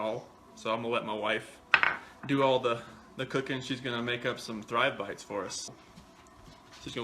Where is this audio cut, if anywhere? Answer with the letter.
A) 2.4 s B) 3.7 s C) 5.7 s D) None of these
C